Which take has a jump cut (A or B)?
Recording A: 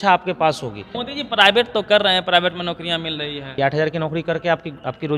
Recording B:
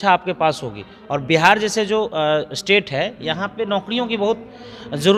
A